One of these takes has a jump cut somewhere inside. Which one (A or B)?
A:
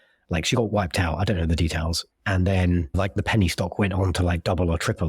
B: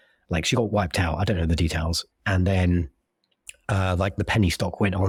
A